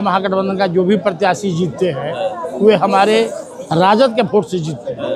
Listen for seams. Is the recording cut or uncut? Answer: uncut